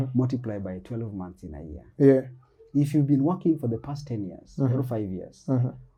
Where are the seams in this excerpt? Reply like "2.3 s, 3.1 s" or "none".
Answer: none

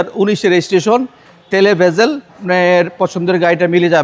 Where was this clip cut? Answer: 2.4 s

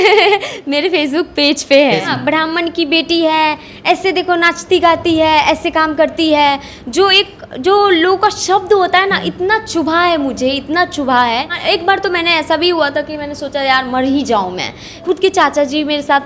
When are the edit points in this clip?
2.1 s, 11.6 s, 15.0 s

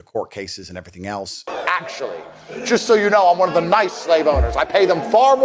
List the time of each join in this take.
1.5 s

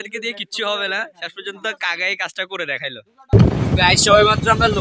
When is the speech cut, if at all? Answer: 3.3 s

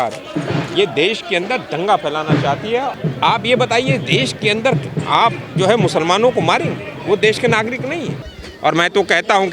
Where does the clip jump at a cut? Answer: 2.9 s, 8.2 s

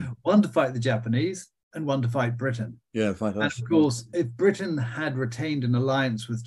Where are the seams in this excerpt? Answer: none

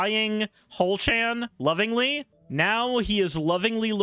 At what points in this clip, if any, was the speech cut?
2.3 s

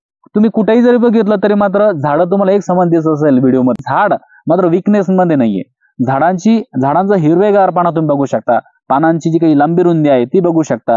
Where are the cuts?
3.8 s

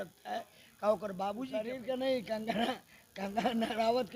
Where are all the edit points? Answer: 1.6 s

